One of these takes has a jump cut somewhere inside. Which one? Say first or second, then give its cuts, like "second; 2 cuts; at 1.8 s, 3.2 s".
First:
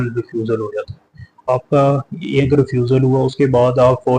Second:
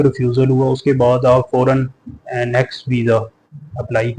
first; 1 cut; at 1.4 s